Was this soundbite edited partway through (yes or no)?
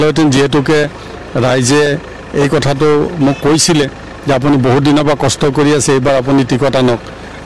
no